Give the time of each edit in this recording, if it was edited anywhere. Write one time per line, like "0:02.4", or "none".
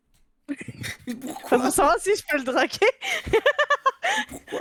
none